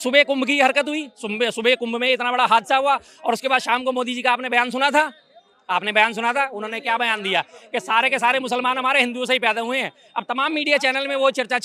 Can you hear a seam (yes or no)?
no